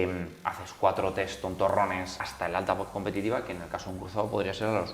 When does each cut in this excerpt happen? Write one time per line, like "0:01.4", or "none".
0:02.2